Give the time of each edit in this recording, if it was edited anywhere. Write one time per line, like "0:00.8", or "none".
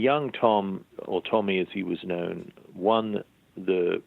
0:00.9